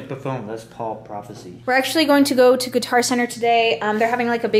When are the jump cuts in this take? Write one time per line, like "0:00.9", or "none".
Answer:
0:01.5